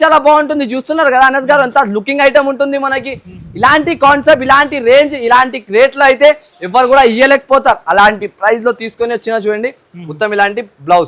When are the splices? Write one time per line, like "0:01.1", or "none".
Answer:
none